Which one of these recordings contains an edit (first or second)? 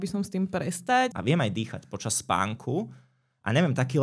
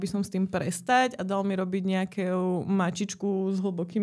first